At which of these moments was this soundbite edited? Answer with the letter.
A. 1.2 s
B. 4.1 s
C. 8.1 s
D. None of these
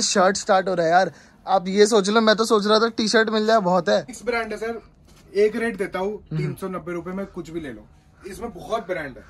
B